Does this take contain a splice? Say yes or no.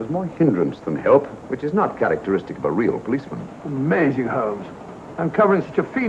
no